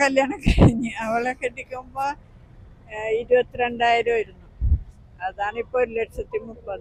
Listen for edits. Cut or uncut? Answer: uncut